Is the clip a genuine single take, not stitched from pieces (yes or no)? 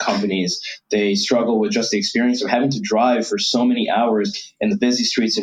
yes